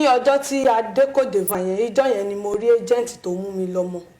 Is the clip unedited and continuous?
no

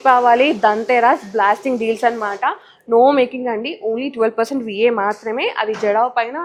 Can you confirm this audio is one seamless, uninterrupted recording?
yes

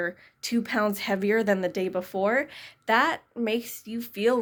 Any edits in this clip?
no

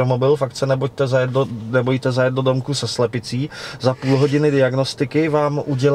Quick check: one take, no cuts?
yes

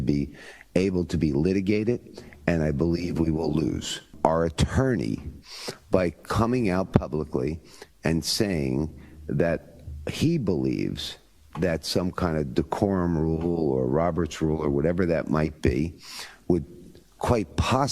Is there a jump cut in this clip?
yes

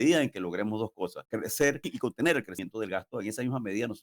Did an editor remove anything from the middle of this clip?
yes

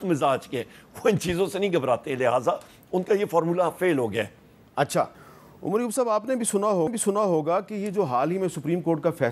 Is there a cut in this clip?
no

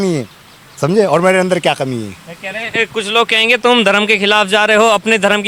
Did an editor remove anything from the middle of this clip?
no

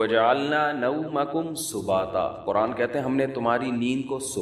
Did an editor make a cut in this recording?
no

